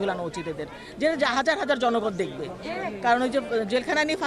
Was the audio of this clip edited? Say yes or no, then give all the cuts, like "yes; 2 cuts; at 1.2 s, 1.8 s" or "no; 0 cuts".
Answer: no; 0 cuts